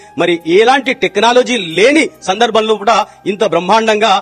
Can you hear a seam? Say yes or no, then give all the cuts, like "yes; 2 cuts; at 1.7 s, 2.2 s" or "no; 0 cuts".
no; 0 cuts